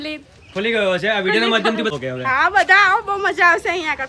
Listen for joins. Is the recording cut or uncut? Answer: cut